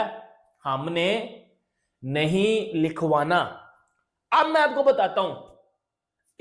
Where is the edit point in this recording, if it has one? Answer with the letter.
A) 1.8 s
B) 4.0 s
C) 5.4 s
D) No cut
D